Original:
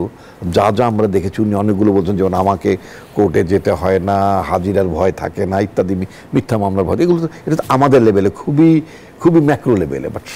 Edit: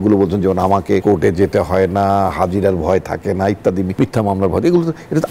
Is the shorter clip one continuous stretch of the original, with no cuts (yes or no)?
no